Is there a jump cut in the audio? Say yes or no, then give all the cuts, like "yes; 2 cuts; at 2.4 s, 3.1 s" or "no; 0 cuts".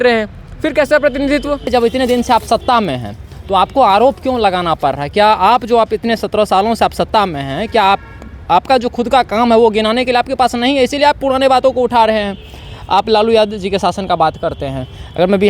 yes; 1 cut; at 1.7 s